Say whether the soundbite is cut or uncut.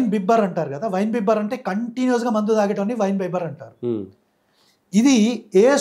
uncut